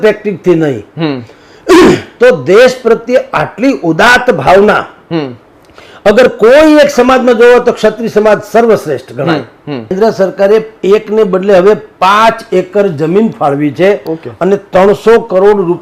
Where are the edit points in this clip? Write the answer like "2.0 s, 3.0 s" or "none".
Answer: 9.9 s